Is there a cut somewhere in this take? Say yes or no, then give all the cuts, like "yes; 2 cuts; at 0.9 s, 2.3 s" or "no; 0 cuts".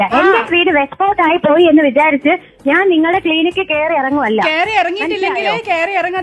no; 0 cuts